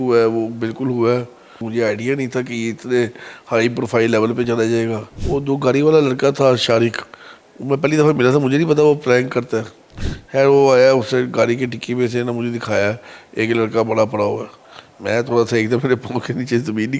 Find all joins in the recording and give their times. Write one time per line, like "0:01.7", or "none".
0:01.6
0:05.1